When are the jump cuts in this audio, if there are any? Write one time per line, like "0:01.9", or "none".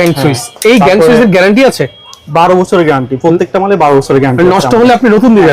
none